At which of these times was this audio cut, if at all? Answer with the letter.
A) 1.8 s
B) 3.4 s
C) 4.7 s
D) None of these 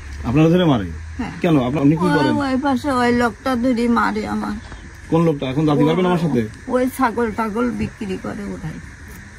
A